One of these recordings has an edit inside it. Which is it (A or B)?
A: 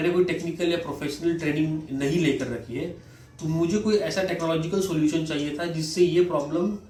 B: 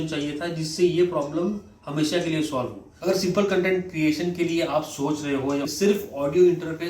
B